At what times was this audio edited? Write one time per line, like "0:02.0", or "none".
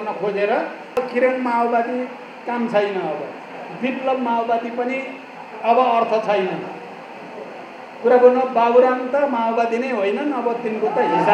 0:01.0

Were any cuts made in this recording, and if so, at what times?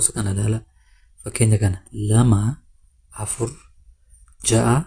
none

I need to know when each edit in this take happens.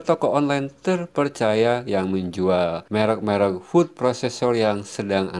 0:02.8

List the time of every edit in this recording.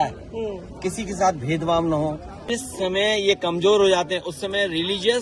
0:02.3

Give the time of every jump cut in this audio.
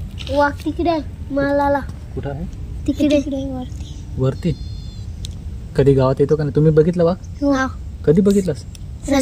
none

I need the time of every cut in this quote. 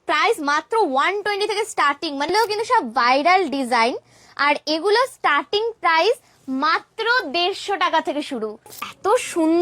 0:02.3
0:08.7

